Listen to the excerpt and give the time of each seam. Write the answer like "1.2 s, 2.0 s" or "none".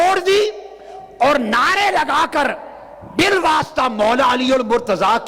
none